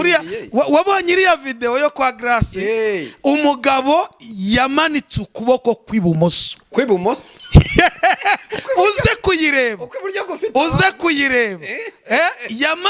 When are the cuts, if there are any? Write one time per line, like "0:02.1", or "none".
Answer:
none